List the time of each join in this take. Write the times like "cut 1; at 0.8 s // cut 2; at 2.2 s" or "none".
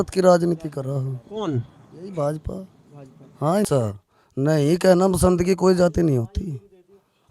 cut 1; at 3.7 s